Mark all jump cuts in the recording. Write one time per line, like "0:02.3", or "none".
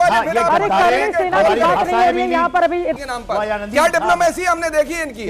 0:03.0